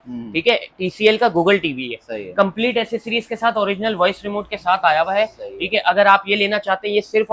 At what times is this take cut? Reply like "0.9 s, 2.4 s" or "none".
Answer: none